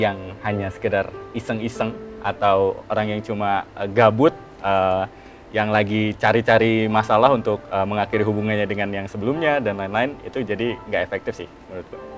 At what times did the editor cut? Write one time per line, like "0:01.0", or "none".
none